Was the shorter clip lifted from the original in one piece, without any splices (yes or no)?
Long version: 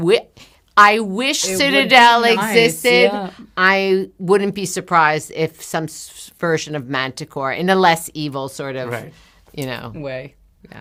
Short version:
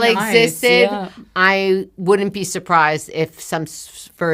yes